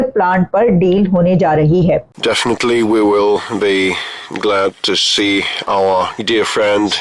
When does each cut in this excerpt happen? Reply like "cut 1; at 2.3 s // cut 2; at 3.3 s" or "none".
cut 1; at 2.1 s